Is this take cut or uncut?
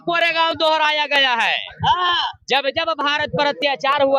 uncut